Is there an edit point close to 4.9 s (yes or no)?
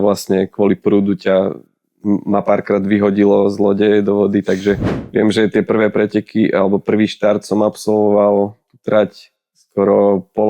yes